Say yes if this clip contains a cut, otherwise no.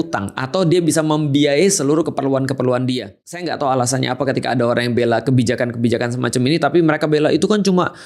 yes